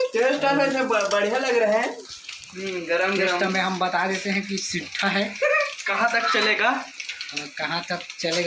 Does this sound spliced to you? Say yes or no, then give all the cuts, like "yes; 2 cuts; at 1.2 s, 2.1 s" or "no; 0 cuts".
no; 0 cuts